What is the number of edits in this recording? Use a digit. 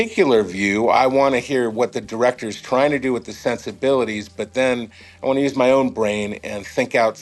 1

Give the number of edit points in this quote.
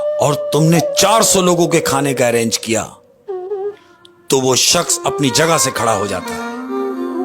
1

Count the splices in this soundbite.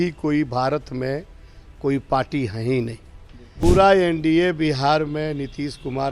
1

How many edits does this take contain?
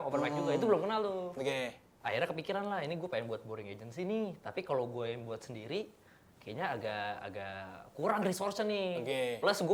1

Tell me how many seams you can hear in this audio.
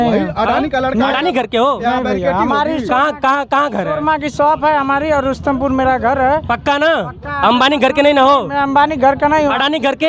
0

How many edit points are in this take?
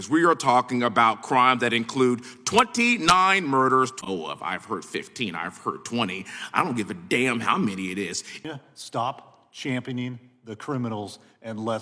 2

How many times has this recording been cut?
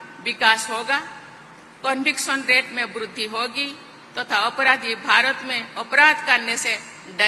0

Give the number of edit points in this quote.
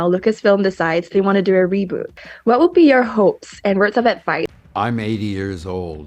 2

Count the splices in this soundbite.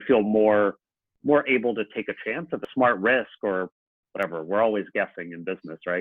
1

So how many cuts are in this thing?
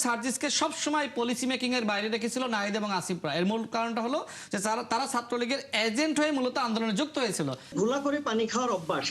1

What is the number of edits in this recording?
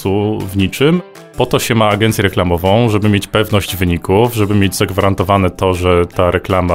1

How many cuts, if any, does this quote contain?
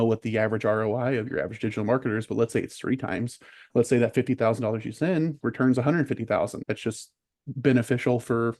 2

